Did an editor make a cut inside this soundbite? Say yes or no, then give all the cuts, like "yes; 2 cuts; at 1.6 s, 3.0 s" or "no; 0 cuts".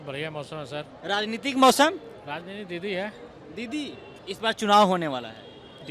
yes; 1 cut; at 4.1 s